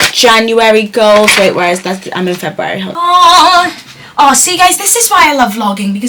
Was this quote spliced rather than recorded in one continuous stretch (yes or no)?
yes